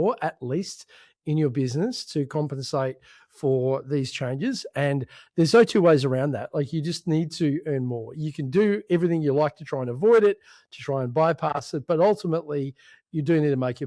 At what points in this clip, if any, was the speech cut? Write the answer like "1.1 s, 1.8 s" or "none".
none